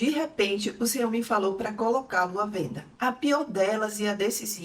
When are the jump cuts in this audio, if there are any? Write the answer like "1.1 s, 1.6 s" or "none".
2.8 s